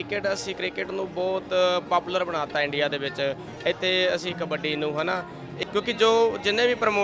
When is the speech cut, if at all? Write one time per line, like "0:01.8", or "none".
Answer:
0:05.5